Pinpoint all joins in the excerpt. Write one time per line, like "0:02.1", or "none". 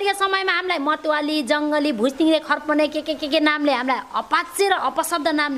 none